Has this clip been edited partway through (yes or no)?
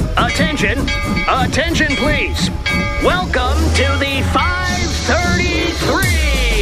no